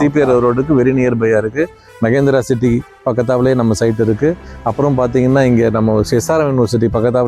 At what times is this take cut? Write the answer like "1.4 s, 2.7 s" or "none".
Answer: none